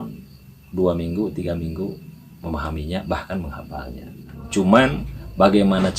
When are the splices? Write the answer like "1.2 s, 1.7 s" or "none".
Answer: 4.4 s